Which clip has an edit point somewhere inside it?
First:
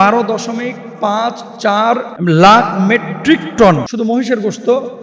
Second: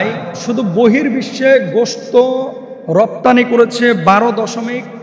first; 2 cuts; at 2.1 s, 3.9 s

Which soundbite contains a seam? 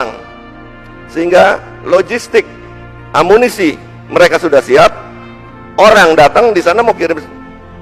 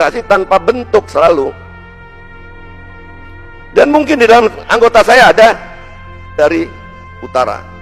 second; 1 cut; at 6.3 s

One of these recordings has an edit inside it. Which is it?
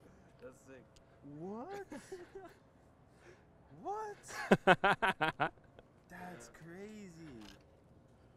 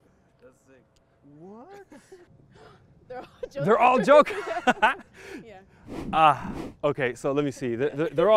second; 1 cut; at 2.3 s

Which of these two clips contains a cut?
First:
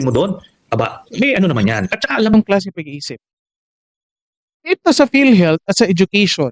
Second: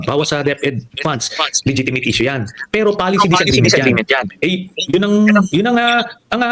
first; 1 cut; at 2.3 s

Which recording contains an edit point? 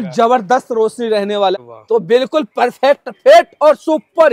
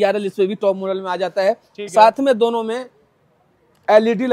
first; 1 cut; at 1.6 s

